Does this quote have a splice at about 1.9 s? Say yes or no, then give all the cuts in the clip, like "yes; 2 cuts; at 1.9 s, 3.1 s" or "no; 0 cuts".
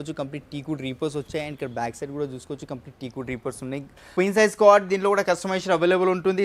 no; 1 cut; at 3.9 s